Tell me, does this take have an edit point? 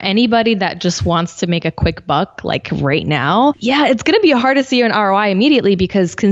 yes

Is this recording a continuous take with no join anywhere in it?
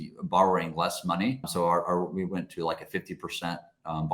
no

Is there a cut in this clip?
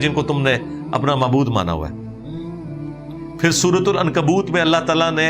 no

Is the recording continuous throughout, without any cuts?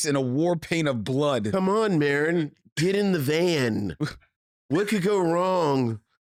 yes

